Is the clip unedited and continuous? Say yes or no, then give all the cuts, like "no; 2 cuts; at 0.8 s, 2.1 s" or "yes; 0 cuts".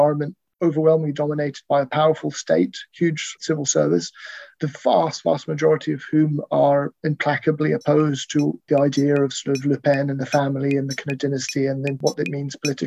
no; 4 cuts; at 3.3 s, 4.4 s, 8.6 s, 12.0 s